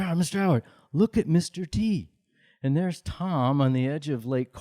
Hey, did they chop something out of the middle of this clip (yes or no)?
yes